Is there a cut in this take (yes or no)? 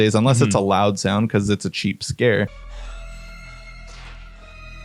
yes